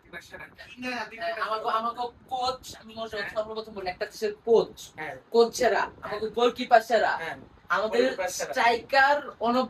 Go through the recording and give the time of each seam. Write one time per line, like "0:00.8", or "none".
none